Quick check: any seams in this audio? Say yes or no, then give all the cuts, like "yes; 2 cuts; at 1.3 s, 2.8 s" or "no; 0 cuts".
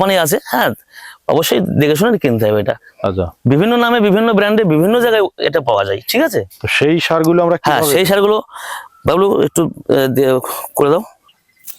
no; 0 cuts